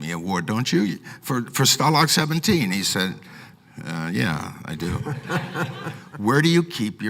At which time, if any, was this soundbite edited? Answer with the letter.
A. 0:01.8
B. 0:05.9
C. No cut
B